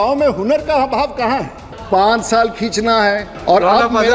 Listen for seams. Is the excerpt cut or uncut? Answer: cut